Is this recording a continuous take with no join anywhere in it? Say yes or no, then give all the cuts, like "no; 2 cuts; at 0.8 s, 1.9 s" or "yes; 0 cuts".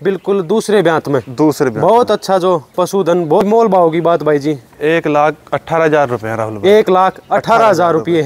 no; 1 cut; at 3.4 s